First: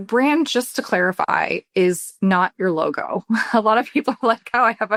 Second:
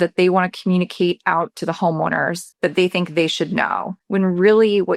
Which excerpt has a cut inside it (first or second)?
second